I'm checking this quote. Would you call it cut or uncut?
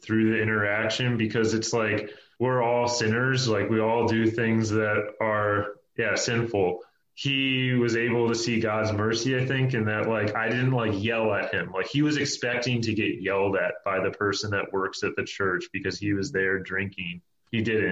uncut